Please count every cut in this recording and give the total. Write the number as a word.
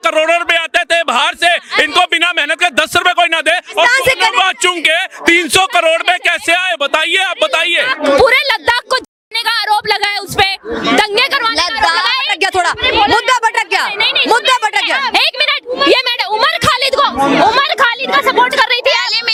zero